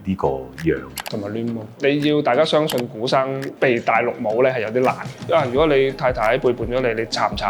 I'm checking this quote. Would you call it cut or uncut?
cut